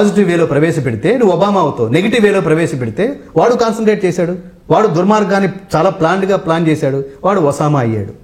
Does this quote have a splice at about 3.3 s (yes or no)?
no